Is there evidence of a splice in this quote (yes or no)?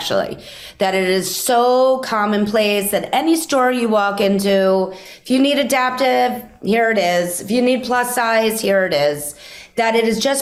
no